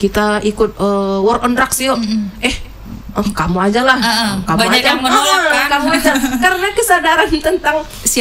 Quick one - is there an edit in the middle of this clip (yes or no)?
no